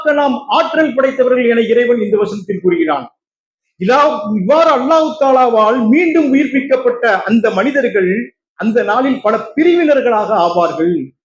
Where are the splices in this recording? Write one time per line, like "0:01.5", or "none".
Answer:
none

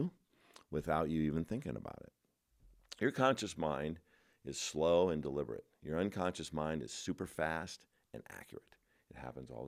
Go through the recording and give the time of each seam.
none

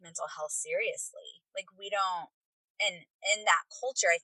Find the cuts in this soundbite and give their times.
none

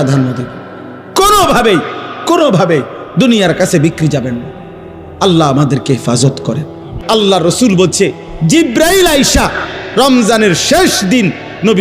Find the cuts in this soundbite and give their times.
0:06.9

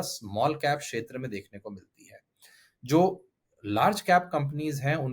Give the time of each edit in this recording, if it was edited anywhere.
none

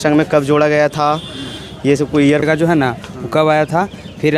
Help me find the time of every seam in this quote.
0:02.4

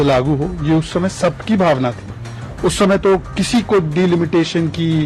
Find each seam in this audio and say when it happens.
none

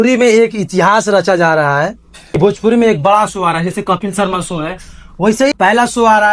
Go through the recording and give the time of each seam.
0:02.4
0:05.5

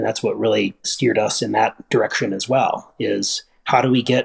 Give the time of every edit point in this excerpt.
none

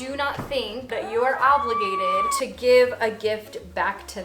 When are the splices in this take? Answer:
0:00.9
0:02.4

